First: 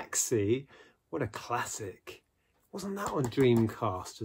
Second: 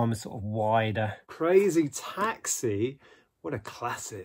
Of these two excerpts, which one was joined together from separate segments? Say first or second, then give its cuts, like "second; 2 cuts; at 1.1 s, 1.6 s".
second; 1 cut; at 1.2 s